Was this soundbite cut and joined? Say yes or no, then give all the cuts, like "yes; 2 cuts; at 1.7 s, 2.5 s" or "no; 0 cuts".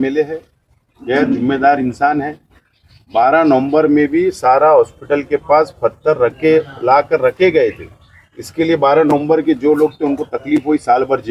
no; 0 cuts